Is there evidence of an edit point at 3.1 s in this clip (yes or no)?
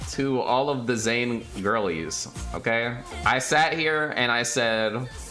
yes